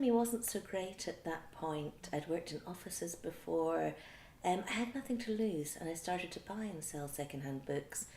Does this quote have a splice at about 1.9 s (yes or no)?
no